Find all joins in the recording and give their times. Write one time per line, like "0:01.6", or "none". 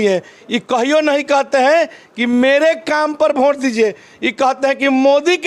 none